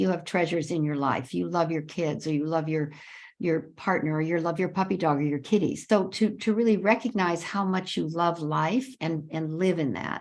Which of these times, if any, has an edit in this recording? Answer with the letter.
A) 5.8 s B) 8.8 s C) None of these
A